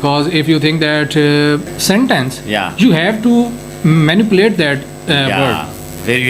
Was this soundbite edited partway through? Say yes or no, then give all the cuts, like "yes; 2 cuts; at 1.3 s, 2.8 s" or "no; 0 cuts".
yes; 1 cut; at 1.7 s